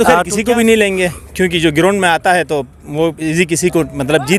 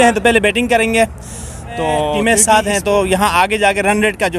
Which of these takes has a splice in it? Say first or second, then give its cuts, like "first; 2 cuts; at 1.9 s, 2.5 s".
second; 1 cut; at 2.1 s